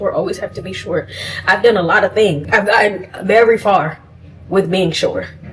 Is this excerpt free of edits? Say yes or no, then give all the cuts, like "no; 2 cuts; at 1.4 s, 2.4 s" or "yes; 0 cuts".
no; 1 cut; at 2.4 s